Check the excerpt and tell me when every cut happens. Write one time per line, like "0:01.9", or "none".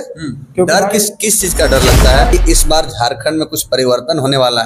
0:02.3

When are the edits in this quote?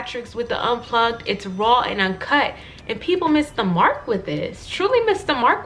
none

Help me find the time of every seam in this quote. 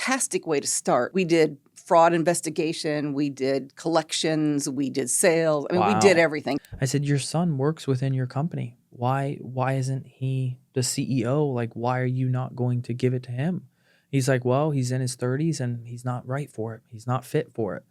0:01.1
0:06.6

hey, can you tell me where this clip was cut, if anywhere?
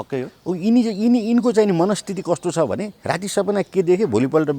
0:02.9

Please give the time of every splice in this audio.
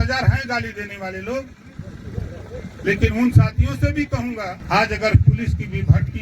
0:04.6

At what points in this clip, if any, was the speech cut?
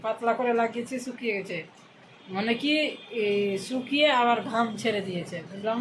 none

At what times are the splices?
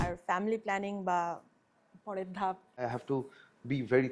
0:02.8

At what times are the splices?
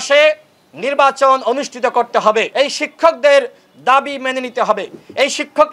0:02.5

